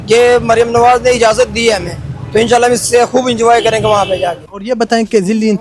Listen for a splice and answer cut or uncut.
cut